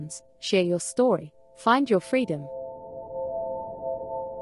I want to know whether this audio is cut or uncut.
cut